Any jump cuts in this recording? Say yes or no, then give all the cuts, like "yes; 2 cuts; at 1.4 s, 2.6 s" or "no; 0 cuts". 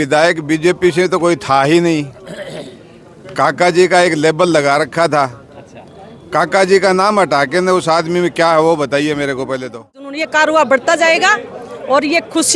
yes; 1 cut; at 10.2 s